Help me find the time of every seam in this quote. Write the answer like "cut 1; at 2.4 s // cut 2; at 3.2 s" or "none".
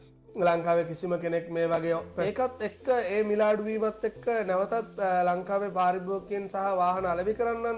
cut 1; at 2.2 s